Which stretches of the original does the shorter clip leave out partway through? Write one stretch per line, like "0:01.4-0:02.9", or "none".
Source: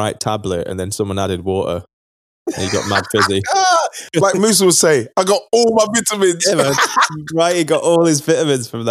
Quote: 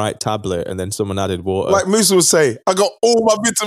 0:01.7-0:04.2